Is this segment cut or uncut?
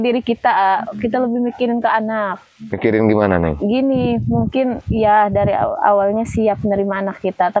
uncut